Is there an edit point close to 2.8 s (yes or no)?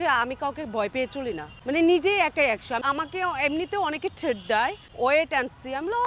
yes